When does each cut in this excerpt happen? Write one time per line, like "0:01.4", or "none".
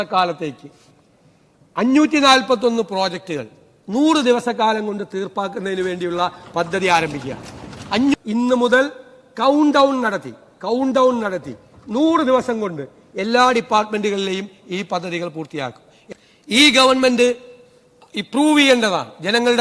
0:08.1
0:15.9